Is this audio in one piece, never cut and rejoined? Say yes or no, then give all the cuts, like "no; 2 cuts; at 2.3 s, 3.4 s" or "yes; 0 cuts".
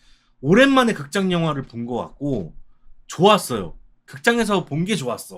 yes; 0 cuts